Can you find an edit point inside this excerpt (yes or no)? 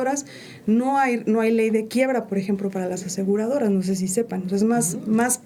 no